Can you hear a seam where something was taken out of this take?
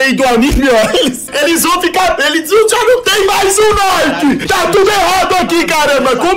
yes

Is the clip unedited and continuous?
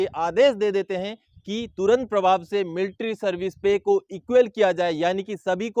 yes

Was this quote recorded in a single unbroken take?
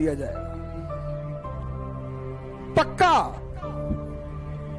no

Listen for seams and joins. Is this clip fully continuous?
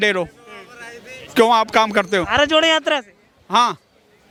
yes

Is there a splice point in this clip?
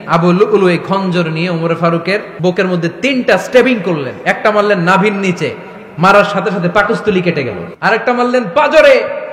yes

